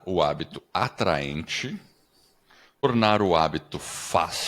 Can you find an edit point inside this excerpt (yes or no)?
yes